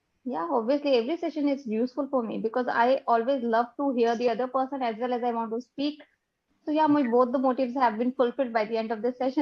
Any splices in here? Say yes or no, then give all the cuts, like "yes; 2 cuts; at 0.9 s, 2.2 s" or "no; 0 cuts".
no; 0 cuts